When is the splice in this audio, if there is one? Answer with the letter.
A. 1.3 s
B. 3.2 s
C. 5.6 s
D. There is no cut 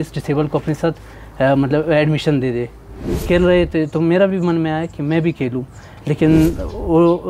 B